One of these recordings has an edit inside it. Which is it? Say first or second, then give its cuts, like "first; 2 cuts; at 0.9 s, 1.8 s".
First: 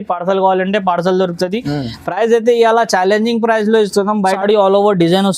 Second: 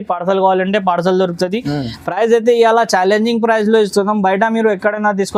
first; 1 cut; at 4.4 s